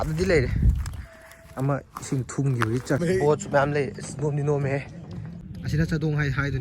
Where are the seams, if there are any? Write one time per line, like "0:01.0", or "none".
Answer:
0:03.0
0:05.5